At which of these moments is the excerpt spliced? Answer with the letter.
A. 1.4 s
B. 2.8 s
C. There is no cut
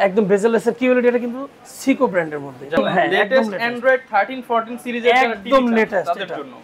B